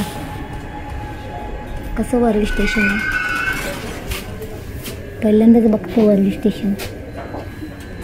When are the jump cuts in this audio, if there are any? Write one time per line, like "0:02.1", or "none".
none